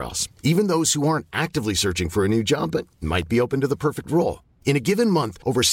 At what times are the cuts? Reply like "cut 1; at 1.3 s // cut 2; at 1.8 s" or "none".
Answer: none

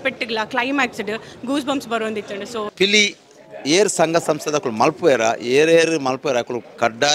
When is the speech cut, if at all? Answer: cut 1; at 2.7 s

